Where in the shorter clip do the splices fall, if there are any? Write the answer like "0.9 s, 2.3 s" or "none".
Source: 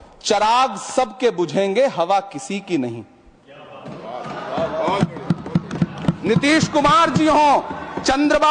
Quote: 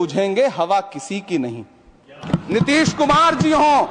2.5 s

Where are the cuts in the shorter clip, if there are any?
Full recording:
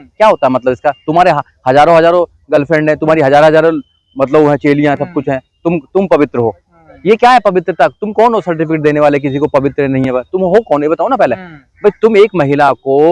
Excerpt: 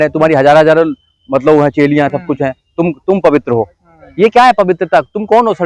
none

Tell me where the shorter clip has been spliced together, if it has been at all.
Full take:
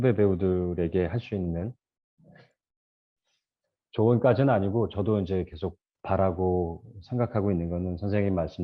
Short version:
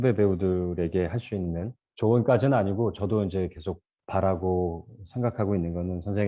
1.8 s

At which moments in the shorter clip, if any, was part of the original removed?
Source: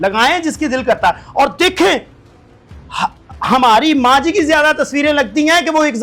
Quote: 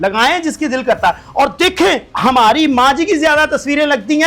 2.1 s

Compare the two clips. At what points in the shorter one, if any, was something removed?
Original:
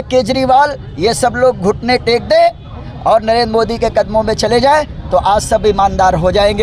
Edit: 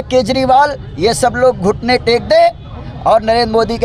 none

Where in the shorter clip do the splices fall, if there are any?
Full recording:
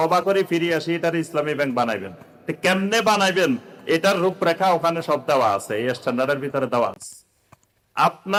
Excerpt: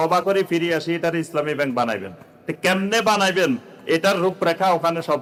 none

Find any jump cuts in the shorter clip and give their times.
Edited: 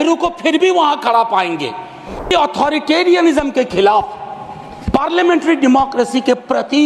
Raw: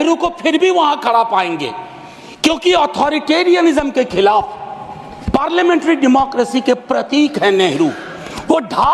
2.3 s

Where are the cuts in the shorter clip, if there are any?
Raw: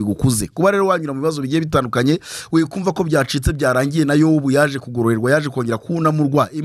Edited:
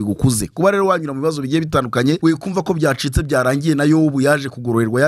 2.2 s

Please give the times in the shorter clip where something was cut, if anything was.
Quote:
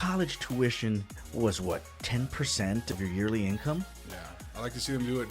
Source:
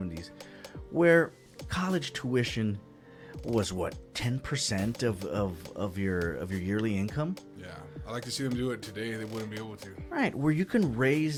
1.2 s, 2.9 s

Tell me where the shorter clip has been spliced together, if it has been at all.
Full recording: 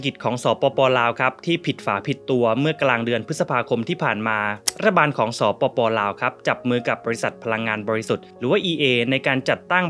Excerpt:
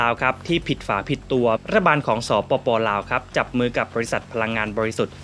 1.6 s

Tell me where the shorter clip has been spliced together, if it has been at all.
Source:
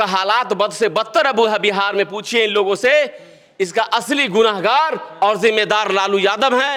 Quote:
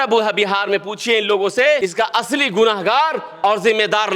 1.8 s

